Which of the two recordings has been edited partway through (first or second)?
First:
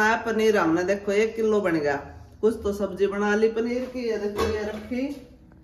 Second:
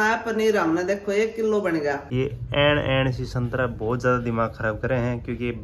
second